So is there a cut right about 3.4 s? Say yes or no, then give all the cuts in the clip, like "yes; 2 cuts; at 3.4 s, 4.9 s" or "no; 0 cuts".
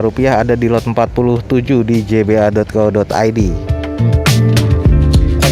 no; 0 cuts